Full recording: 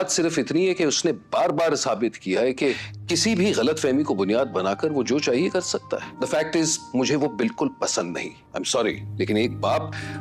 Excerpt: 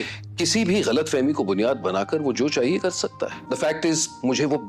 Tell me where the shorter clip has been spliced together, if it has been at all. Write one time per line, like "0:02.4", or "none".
none